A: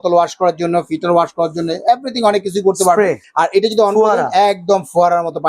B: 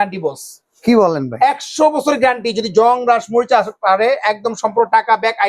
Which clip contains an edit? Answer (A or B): A